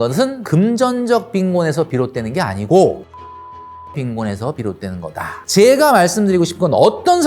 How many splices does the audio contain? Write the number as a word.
one